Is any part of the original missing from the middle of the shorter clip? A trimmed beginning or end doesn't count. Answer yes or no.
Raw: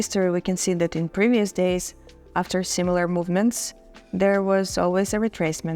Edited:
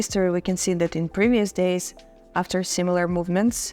no